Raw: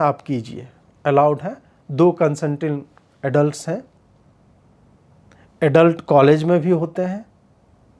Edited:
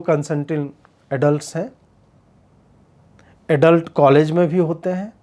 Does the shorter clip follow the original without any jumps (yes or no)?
yes